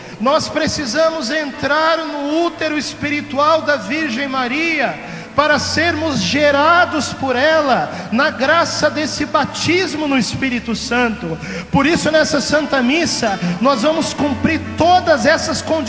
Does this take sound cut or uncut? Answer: uncut